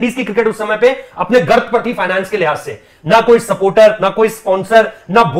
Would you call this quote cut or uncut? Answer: uncut